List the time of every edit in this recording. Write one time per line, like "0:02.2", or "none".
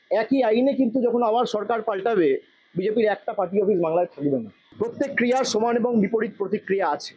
0:04.6